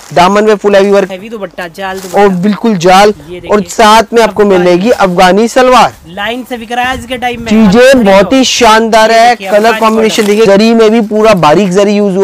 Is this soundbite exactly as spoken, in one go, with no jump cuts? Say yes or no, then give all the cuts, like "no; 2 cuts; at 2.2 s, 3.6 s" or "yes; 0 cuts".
no; 2 cuts; at 1.1 s, 10.5 s